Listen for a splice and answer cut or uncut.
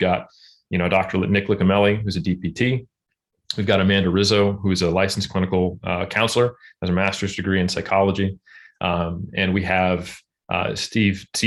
uncut